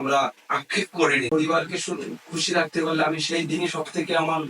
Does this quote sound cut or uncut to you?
cut